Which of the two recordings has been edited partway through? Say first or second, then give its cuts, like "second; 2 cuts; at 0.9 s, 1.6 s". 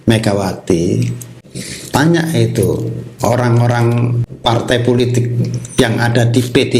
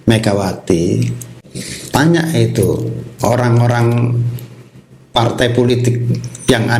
first; 1 cut; at 4.3 s